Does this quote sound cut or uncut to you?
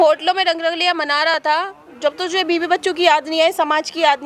uncut